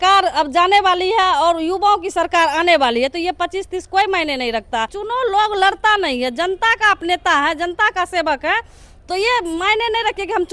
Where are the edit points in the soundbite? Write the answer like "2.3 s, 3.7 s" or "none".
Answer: 5.0 s